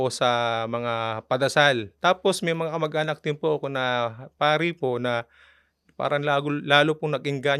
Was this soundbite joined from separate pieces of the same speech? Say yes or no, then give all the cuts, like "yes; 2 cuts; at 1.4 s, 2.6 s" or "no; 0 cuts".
yes; 1 cut; at 1.9 s